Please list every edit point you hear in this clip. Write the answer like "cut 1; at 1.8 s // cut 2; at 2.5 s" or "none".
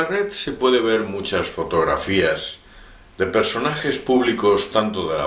none